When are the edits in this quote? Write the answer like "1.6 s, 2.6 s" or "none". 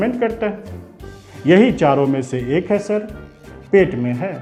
none